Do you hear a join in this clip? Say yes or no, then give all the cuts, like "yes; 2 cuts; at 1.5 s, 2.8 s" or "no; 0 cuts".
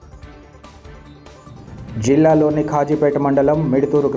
no; 0 cuts